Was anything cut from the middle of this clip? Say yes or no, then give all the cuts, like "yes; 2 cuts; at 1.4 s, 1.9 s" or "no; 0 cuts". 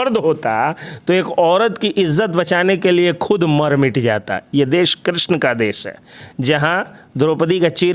no; 0 cuts